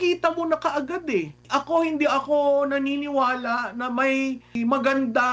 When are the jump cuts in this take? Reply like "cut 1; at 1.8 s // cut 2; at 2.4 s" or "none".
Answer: cut 1; at 1.5 s // cut 2; at 4.5 s